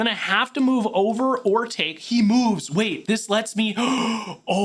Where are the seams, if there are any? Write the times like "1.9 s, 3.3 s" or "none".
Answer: none